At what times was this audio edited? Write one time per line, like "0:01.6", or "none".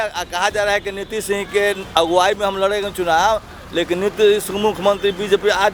none